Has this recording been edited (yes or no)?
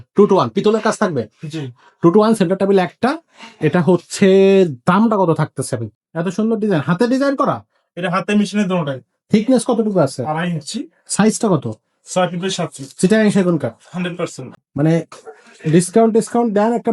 yes